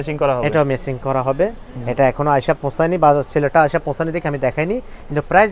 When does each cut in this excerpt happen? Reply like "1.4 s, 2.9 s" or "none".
none